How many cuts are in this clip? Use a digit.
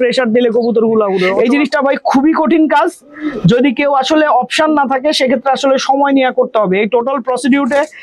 1